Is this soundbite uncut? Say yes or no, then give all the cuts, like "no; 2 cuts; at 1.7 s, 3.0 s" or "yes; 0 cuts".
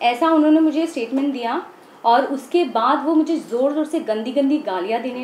yes; 0 cuts